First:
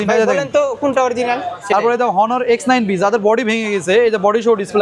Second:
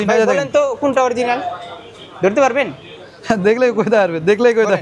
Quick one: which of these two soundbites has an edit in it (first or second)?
first